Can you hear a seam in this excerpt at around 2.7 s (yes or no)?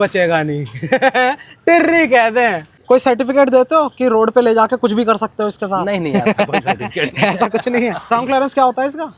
yes